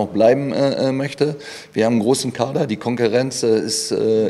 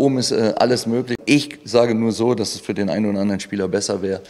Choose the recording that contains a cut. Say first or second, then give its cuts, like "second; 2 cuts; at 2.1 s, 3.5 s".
second; 1 cut; at 1.2 s